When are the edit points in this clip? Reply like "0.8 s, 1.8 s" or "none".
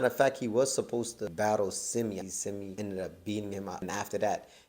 1.2 s, 2.4 s, 3.8 s